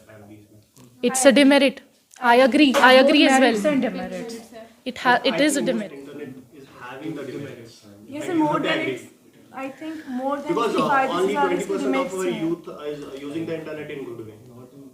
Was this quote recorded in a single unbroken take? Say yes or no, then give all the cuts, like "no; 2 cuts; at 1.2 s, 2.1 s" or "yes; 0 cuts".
no; 1 cut; at 5.8 s